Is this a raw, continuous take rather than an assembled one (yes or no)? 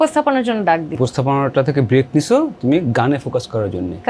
no